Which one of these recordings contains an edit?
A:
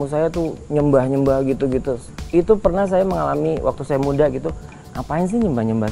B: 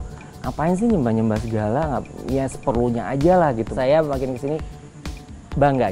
B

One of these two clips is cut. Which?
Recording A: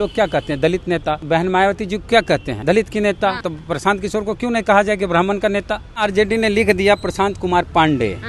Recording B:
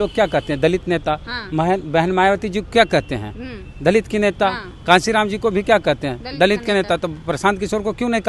A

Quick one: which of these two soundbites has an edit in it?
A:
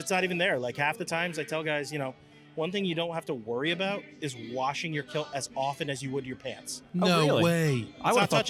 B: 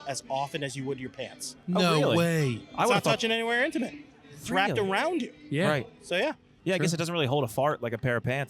B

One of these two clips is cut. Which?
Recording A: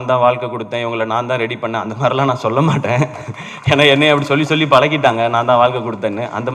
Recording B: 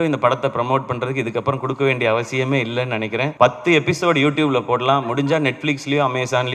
B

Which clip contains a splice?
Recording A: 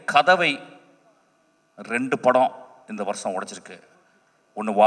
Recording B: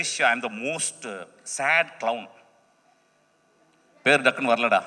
B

